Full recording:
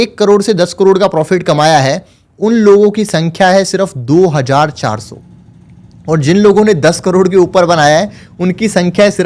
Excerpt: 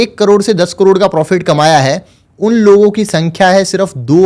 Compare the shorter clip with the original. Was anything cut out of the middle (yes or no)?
no